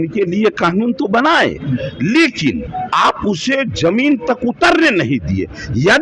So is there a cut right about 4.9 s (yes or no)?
no